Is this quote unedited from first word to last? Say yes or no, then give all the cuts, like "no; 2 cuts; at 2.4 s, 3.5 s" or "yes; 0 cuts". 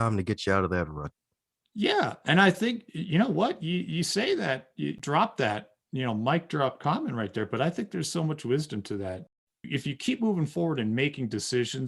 no; 2 cuts; at 5.0 s, 9.2 s